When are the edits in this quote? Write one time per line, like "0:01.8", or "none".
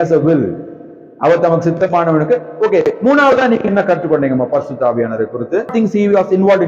0:05.7